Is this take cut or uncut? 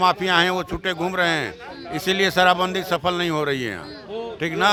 uncut